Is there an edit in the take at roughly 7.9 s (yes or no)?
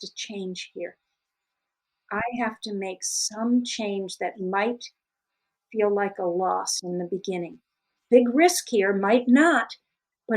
yes